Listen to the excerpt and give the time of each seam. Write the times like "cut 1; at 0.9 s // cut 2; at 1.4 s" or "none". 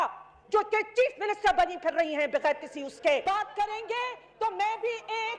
cut 1; at 3.2 s